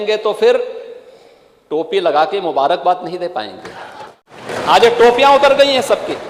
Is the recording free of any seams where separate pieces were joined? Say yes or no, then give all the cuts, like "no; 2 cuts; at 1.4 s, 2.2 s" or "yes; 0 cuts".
no; 1 cut; at 4.3 s